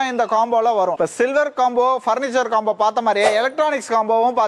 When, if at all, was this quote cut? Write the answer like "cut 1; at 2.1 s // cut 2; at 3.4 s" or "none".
cut 1; at 1.0 s

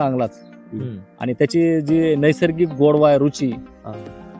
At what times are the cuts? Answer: none

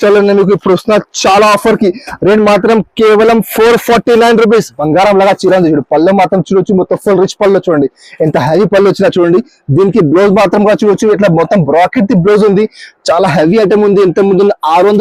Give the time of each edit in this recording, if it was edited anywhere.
cut 1; at 4.8 s

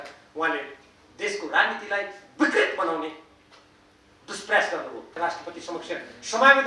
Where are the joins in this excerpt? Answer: cut 1; at 5.2 s

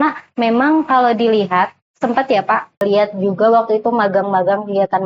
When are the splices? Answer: cut 1; at 2.8 s

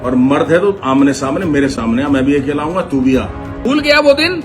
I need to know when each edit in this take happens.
cut 1; at 3.5 s

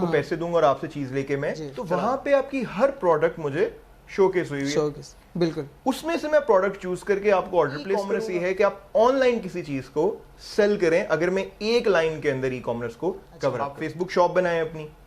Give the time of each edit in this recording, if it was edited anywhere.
cut 1; at 1.7 s // cut 2; at 8.1 s // cut 3; at 13.8 s

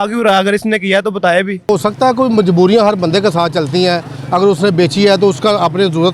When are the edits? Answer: cut 1; at 1.7 s

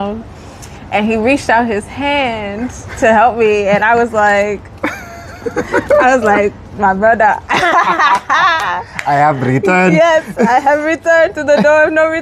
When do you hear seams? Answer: none

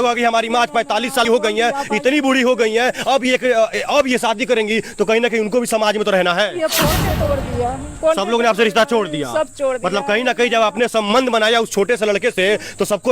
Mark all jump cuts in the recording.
cut 1; at 1.3 s // cut 2; at 7.0 s

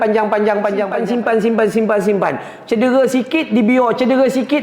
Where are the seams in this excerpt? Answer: cut 1; at 1.0 s

